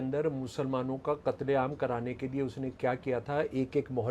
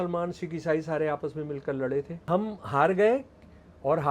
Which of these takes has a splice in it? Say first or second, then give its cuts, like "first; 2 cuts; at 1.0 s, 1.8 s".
second; 1 cut; at 2.2 s